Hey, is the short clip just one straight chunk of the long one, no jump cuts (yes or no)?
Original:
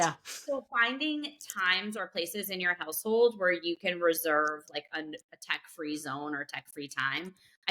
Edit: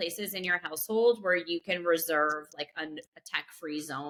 yes